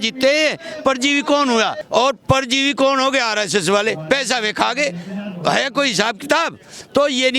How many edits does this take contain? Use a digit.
1